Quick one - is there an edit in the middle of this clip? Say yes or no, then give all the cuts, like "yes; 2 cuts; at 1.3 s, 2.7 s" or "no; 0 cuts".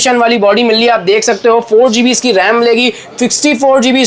no; 0 cuts